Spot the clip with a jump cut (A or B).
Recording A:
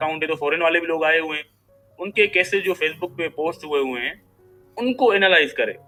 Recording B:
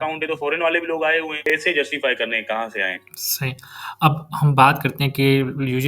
B